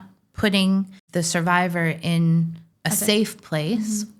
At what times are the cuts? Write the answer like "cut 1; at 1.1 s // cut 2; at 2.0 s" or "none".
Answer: cut 1; at 1.0 s // cut 2; at 2.7 s